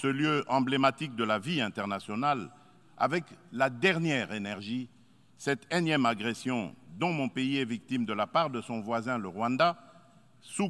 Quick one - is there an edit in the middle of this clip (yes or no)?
no